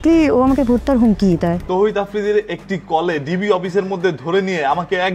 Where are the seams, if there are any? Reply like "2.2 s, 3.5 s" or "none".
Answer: 1.6 s